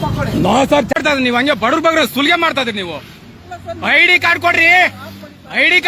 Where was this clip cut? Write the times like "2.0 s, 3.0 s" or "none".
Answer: 0.9 s